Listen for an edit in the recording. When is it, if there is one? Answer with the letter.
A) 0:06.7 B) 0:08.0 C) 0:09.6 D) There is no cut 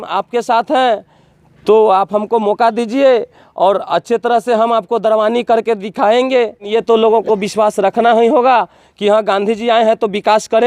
A